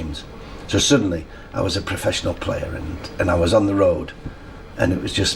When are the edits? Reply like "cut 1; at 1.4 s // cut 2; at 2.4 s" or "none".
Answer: none